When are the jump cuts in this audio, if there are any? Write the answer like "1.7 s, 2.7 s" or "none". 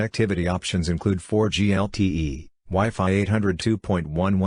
none